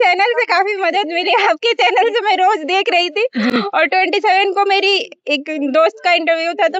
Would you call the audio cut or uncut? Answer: uncut